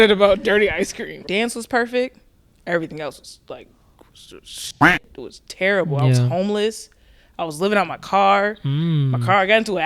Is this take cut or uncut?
cut